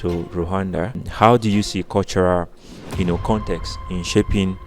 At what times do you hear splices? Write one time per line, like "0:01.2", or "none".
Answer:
0:01.0